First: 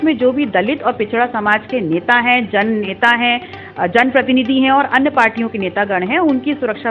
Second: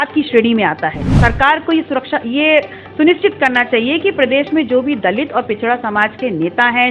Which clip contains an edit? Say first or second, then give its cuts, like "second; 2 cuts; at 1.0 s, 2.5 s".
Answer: second; 1 cut; at 1.1 s